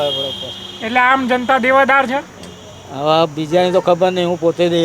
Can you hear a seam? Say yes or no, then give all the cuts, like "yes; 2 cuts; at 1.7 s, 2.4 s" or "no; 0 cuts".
no; 0 cuts